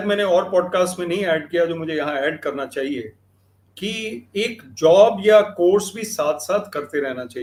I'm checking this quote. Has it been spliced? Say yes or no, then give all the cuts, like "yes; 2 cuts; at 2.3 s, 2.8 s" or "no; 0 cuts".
no; 0 cuts